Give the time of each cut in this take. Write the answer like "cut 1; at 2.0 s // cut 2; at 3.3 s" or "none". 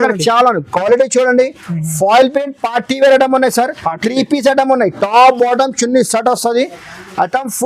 none

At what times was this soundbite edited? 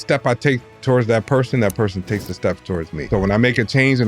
cut 1; at 3.1 s

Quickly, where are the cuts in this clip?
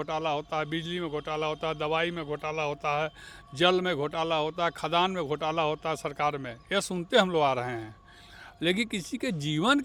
none

